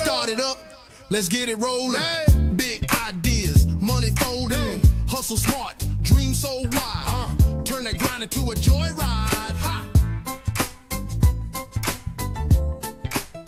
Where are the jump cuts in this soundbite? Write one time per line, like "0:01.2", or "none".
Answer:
none

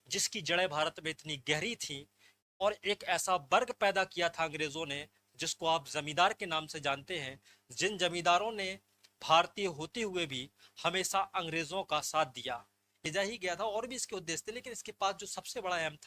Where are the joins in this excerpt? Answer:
0:12.9

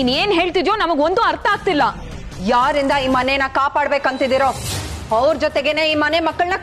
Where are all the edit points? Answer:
none

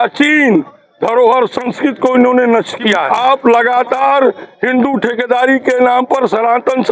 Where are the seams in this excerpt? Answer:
0:03.1

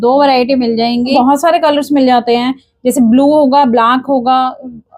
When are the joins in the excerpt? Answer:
0:01.1

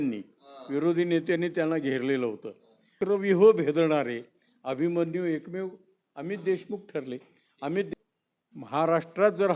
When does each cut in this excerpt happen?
0:02.9
0:07.9

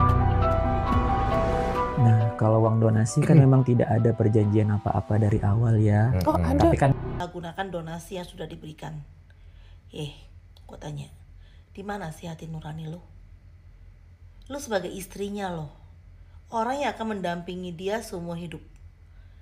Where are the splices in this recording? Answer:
0:07.2

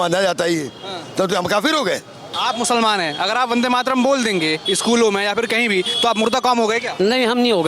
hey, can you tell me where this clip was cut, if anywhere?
0:02.3

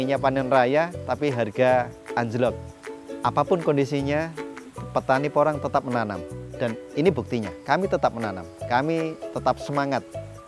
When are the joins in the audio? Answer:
0:02.7

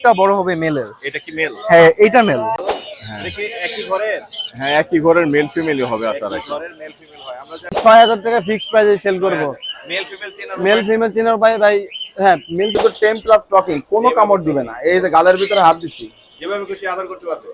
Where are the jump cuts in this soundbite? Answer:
0:02.6
0:07.8
0:12.8

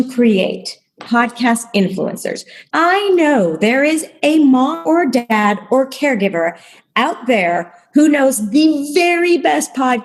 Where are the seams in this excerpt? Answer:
none

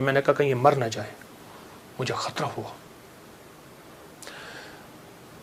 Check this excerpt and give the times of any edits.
none

